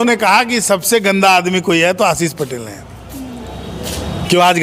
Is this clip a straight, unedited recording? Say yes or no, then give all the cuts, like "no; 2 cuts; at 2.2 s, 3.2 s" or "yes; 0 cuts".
yes; 0 cuts